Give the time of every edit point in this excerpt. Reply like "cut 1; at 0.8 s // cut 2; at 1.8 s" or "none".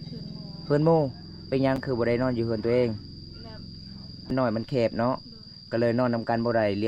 cut 1; at 4.3 s